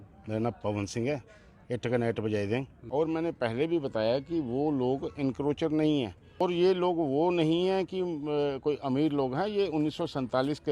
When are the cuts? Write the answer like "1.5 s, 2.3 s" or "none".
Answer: 2.8 s, 6.2 s